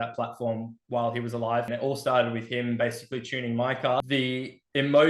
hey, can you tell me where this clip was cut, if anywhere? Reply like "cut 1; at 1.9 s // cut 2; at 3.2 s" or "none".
cut 1; at 1.7 s // cut 2; at 4.0 s

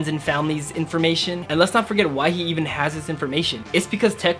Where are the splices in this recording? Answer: cut 1; at 1.4 s

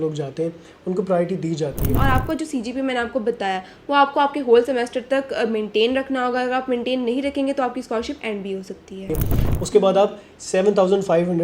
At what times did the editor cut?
cut 1; at 2.0 s // cut 2; at 9.1 s

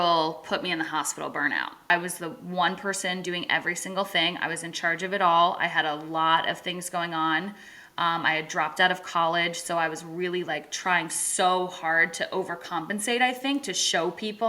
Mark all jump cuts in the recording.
cut 1; at 1.9 s

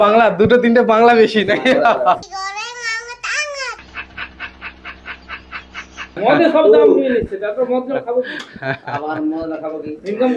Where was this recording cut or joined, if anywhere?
cut 1; at 6.2 s

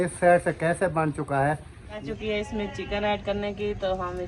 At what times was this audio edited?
cut 1; at 2.0 s

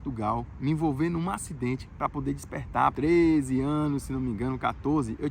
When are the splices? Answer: cut 1; at 2.9 s

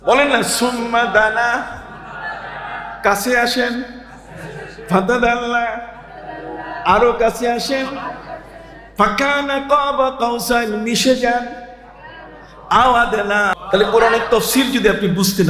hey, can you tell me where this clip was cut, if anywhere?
cut 1; at 13.5 s

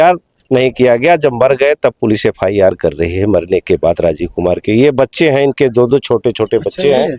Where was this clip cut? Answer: none

